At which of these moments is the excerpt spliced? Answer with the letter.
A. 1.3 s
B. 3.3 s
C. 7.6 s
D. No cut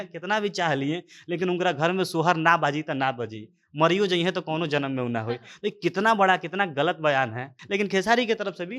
C